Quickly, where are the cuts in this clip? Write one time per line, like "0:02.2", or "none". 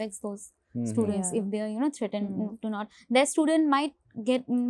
none